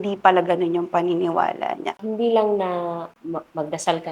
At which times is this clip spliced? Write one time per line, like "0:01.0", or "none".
0:02.0
0:03.1